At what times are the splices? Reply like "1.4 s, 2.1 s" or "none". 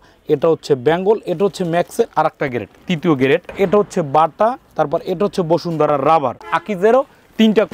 3.5 s, 6.5 s